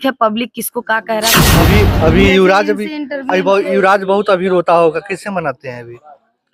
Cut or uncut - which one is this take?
cut